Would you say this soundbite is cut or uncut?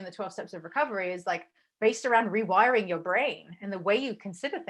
uncut